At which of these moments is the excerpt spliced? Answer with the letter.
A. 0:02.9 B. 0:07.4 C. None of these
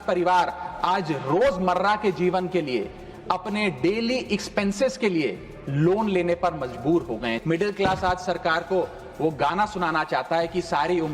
B